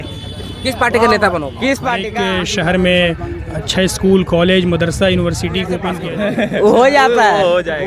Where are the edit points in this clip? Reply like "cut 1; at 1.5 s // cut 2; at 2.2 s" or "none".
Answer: cut 1; at 2.1 s // cut 2; at 6.0 s